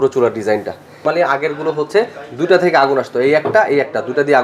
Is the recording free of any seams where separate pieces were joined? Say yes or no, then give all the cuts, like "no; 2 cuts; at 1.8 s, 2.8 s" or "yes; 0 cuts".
no; 1 cut; at 1.0 s